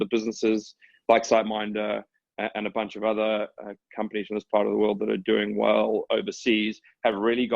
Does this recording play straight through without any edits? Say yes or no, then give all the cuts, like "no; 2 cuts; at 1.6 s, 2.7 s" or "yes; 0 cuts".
yes; 0 cuts